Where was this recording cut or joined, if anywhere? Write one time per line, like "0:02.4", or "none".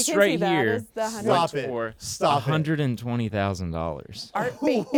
none